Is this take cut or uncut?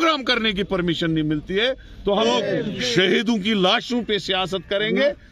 cut